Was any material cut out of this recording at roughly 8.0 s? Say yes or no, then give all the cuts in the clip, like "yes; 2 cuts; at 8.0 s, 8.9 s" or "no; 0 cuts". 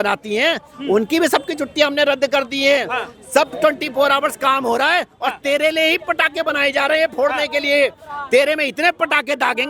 no; 0 cuts